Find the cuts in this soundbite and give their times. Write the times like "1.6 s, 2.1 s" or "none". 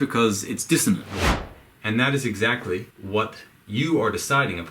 1.2 s, 2.9 s

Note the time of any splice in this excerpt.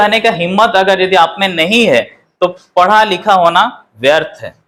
none

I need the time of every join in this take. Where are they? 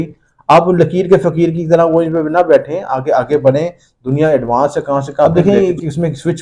5.3 s

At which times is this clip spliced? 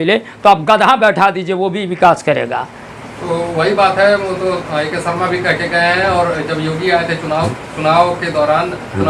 none

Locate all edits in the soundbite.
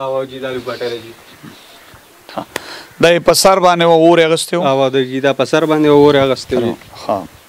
none

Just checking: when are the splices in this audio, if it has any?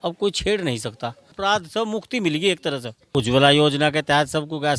1.3 s, 2.9 s

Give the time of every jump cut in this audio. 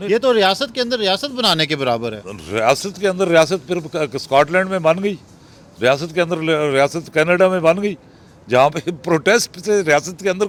none

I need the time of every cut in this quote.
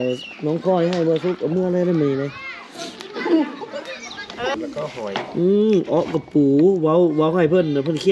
4.5 s

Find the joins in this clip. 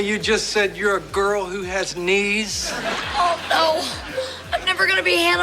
2.9 s

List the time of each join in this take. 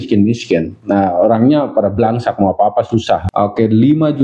3.3 s

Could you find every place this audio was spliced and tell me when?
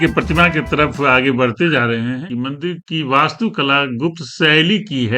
2.3 s

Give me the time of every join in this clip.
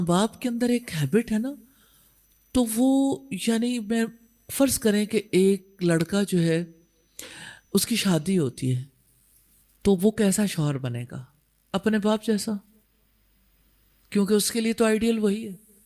none

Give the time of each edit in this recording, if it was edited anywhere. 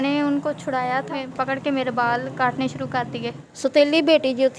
1.3 s, 3.5 s

